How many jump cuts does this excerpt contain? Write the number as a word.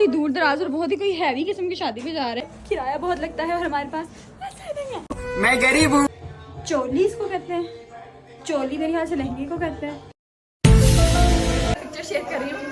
three